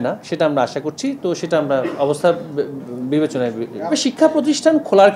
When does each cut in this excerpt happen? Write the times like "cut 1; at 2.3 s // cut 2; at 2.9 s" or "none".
cut 1; at 3.9 s